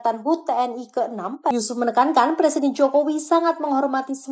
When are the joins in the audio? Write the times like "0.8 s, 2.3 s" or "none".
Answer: 1.5 s

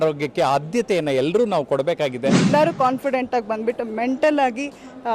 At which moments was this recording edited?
2.5 s

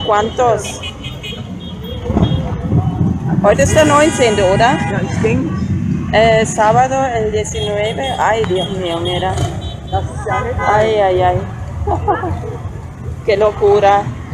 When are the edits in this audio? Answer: 3.0 s

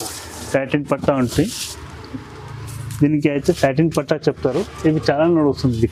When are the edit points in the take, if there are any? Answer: none

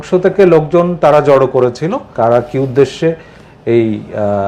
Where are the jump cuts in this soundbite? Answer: 2.1 s

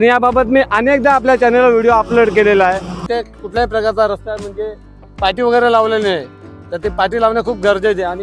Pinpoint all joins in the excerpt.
3.0 s

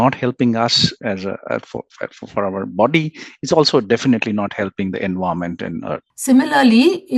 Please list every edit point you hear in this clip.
6.1 s

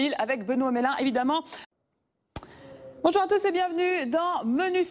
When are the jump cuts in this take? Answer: none

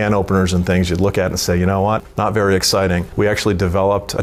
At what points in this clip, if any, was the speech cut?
2.1 s, 3.1 s

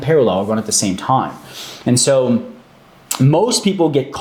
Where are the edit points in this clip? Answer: none

